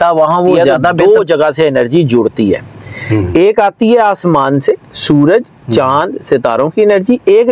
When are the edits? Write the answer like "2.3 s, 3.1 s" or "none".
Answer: 1.0 s